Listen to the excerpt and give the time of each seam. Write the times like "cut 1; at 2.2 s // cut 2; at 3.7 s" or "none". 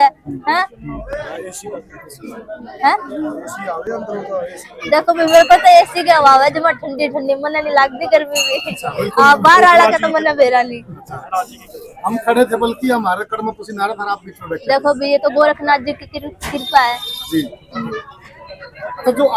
none